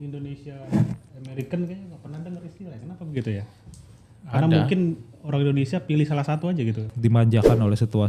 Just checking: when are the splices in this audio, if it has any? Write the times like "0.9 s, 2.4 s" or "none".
6.9 s